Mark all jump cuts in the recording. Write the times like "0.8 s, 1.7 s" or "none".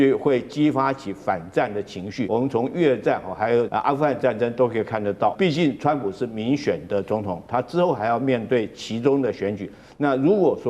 2.3 s, 3.7 s, 5.3 s